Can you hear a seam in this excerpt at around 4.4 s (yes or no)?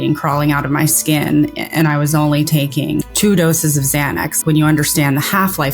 yes